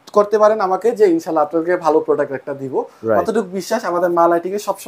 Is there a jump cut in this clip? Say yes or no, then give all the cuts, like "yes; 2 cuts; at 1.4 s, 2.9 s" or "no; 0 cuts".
no; 0 cuts